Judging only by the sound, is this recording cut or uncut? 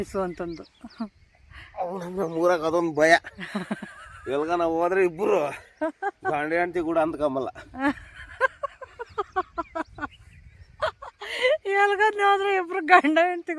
uncut